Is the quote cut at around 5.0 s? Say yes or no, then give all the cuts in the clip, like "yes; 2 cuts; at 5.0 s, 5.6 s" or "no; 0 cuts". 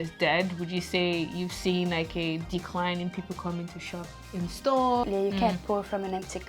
yes; 1 cut; at 5.0 s